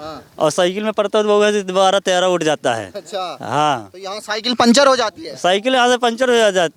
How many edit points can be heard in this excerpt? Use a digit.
0